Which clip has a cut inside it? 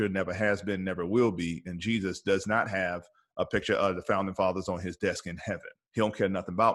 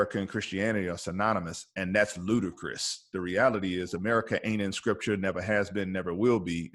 first; 1 cut; at 5.7 s

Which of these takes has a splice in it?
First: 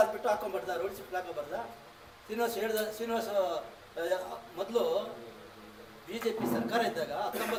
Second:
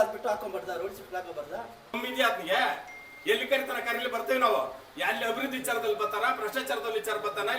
second; 1 cut; at 1.9 s

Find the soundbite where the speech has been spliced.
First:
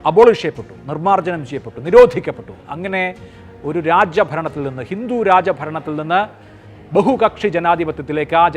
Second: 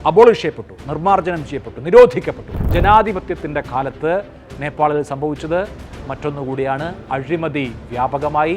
second; 1 cut; at 2.5 s

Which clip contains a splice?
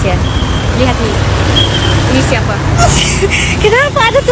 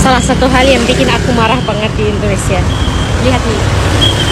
first; 1 cut; at 2.8 s

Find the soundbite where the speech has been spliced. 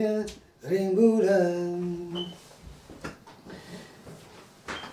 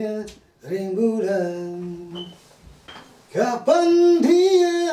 second; 1 cut; at 2.9 s

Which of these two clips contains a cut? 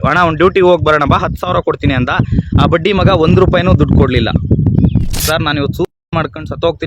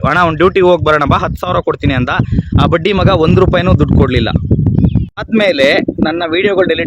first; 1 cut; at 5.2 s

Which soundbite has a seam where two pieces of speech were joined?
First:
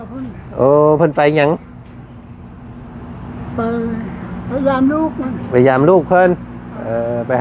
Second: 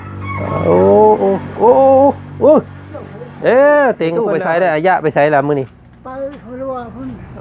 second; 1 cut; at 4.2 s

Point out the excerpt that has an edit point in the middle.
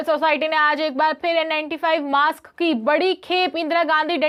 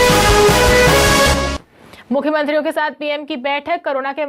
second; 1 cut; at 1.5 s

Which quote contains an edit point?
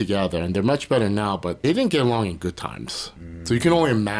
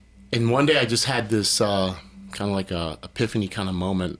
first; 1 cut; at 1.6 s

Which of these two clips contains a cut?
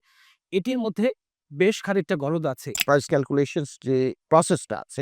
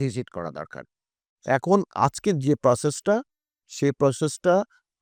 first; 2 cuts; at 3.1 s, 4.2 s

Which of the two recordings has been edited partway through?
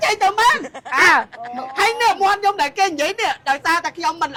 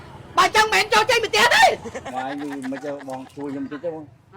second; 1 cut; at 2.1 s

